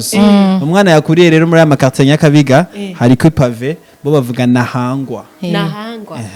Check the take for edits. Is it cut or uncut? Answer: uncut